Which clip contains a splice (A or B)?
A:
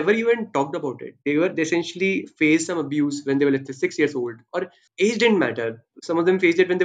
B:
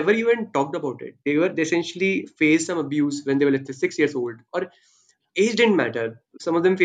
A